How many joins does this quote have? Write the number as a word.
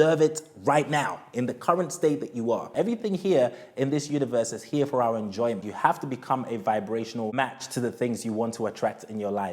three